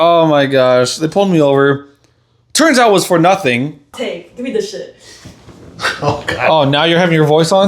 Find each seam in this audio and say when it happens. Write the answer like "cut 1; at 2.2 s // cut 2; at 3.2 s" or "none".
cut 1; at 3.9 s